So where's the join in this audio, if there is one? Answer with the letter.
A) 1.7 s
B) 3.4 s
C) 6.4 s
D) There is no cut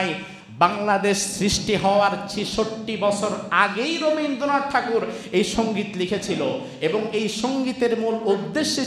D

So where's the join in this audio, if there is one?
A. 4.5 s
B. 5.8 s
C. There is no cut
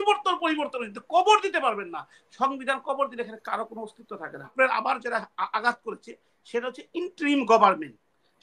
A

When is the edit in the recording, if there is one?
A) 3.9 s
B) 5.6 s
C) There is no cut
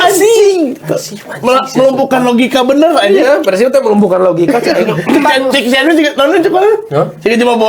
C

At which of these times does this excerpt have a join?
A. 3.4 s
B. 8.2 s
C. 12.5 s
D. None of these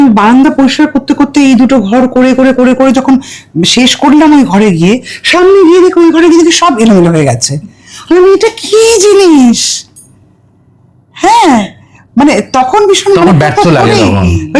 D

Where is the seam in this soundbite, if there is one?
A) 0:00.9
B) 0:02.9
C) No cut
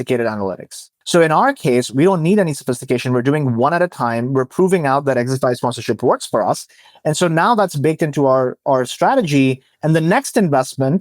A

